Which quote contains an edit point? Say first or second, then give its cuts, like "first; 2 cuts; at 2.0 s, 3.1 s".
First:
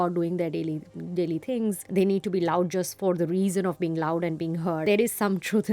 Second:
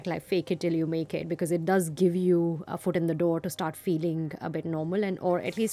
first; 3 cuts; at 1.8 s, 2.9 s, 4.8 s